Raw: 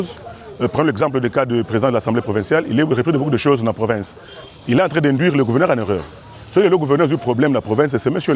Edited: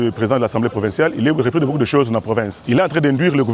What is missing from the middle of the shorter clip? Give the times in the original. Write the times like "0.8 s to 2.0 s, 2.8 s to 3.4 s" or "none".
4.1 s to 4.6 s